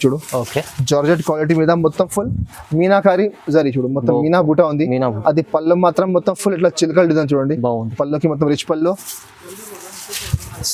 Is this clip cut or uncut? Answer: uncut